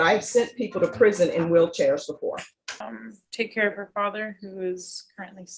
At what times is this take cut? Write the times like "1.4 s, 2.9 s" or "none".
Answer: 2.9 s